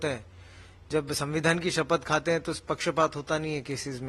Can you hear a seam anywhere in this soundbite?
no; 0 cuts

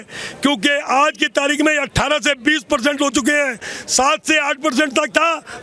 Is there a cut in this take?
no; 0 cuts

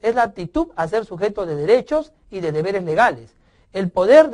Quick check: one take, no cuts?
yes; 0 cuts

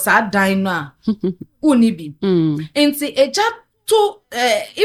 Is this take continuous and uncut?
yes; 0 cuts

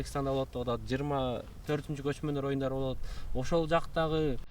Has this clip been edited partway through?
yes; 1 cut; at 1.5 s

